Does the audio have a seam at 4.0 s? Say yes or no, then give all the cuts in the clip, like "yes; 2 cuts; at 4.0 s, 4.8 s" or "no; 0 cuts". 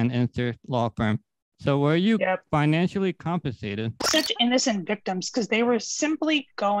yes; 1 cut; at 4.0 s